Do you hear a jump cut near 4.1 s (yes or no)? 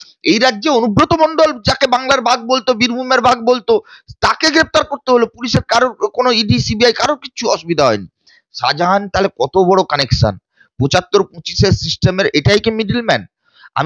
no